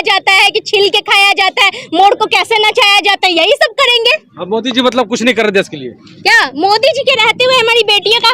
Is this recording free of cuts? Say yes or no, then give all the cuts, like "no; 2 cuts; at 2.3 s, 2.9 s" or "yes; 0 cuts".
yes; 0 cuts